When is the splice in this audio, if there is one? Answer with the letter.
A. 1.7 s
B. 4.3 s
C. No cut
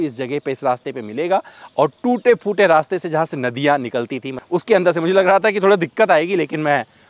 B